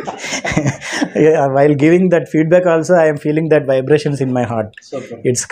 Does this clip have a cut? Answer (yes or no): no